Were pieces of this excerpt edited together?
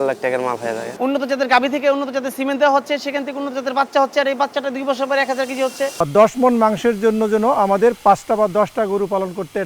yes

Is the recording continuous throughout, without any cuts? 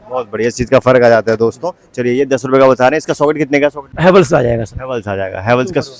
no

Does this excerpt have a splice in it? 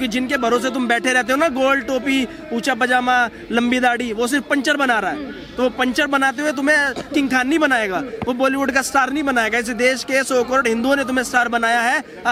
no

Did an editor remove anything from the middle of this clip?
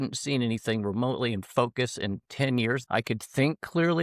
yes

